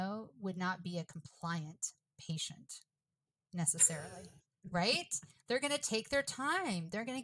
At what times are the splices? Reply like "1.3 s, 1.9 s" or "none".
none